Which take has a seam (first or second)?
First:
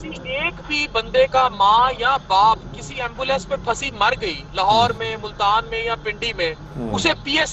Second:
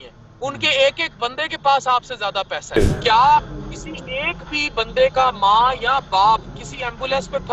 second